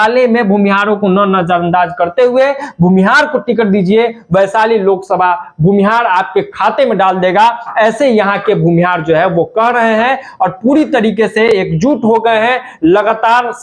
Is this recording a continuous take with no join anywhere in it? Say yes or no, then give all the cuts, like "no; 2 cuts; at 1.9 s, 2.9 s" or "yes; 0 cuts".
yes; 0 cuts